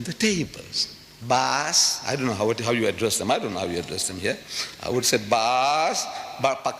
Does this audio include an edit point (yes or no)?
no